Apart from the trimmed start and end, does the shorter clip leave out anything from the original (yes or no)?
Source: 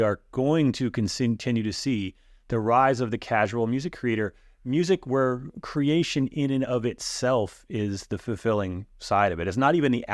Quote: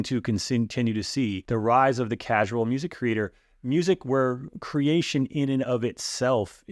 yes